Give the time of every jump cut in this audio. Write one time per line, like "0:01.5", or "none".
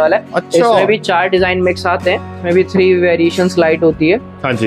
0:02.4